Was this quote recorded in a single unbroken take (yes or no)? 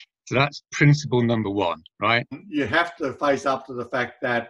no